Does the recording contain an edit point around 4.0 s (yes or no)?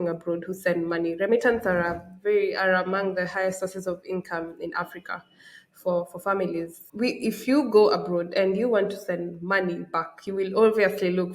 no